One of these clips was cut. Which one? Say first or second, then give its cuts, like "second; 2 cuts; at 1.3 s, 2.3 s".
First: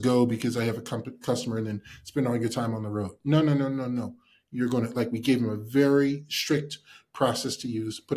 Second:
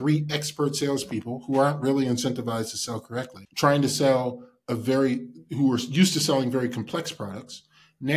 second; 1 cut; at 3.4 s